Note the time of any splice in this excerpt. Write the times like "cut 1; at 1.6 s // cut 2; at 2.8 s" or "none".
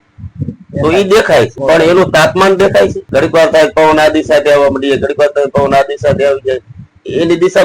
cut 1; at 1.6 s // cut 2; at 3.0 s